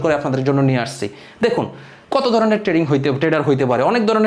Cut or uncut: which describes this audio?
uncut